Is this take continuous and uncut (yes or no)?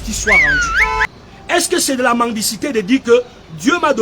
no